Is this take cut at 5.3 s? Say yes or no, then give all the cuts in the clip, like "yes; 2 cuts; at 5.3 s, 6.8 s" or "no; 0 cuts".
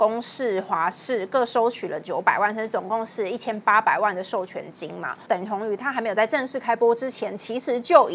yes; 1 cut; at 5.3 s